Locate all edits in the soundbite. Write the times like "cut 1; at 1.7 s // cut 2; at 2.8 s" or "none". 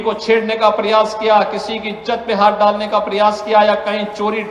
cut 1; at 3.0 s